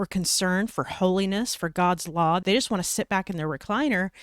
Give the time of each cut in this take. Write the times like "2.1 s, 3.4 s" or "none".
2.4 s